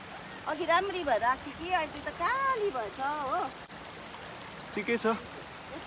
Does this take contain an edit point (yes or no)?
yes